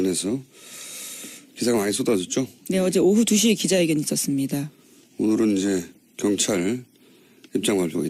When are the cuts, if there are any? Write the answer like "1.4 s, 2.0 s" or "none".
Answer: none